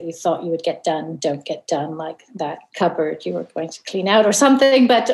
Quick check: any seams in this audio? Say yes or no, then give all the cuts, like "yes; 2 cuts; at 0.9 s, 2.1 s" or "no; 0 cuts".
yes; 1 cut; at 2.6 s